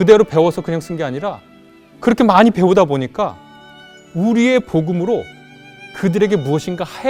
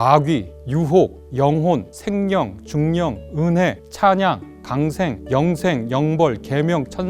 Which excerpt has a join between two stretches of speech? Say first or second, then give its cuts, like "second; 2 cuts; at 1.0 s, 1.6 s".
second; 4 cuts; at 1.0 s, 1.9 s, 3.8 s, 5.2 s